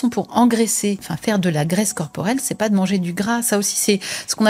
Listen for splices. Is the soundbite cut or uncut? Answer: cut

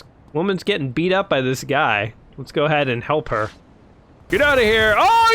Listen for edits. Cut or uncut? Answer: uncut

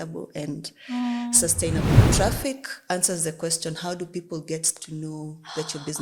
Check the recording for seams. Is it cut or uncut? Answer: cut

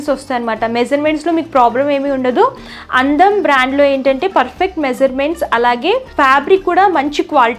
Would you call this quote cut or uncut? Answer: uncut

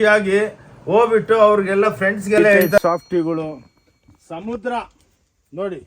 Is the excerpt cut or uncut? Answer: cut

